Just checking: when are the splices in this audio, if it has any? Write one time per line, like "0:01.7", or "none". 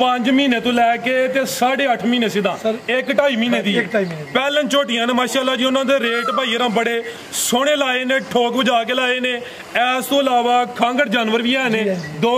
none